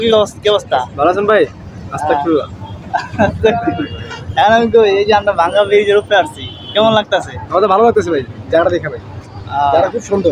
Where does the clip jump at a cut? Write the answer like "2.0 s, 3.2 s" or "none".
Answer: 3.1 s